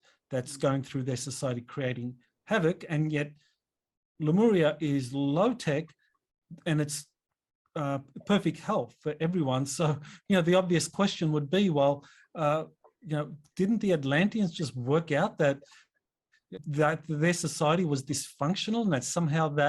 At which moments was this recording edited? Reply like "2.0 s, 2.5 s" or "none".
none